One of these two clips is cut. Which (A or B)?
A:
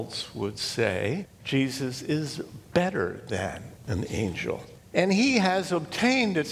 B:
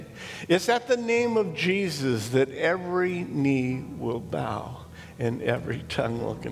A